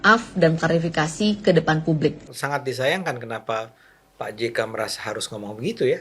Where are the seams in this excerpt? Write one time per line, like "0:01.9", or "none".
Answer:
0:02.3